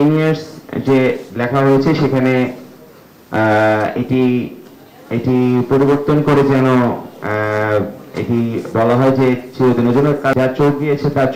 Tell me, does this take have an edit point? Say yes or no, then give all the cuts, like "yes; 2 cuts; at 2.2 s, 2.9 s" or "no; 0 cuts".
yes; 1 cut; at 10.3 s